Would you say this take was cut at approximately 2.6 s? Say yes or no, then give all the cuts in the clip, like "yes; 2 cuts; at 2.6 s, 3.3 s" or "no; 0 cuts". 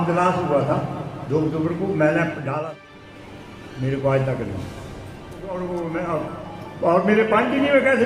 yes; 2 cuts; at 2.6 s, 5.4 s